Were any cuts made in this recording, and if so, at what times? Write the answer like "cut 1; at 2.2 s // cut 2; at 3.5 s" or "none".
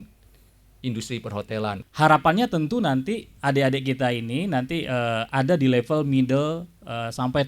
cut 1; at 1.8 s